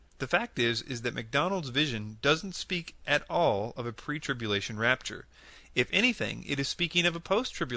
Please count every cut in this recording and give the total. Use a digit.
1